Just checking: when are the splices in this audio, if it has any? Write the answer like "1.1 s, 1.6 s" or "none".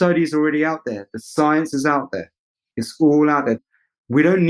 3.6 s